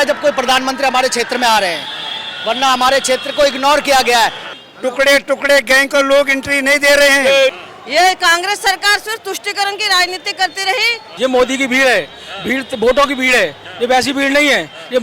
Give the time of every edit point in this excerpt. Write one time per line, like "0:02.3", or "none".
0:04.5
0:07.7
0:11.1